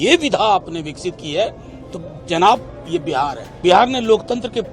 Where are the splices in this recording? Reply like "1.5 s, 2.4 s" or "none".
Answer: 3.4 s